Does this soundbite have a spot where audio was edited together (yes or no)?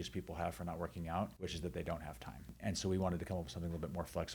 yes